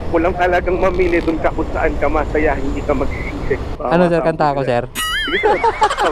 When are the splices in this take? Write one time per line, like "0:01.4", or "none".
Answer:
0:03.7